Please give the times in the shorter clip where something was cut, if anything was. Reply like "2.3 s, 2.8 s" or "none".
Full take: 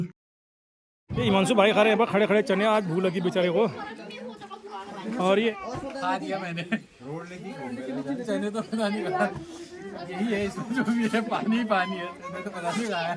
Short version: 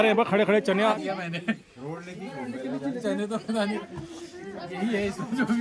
0.9 s, 3.9 s